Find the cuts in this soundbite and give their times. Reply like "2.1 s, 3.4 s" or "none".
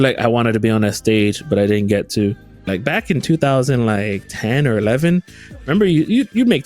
2.6 s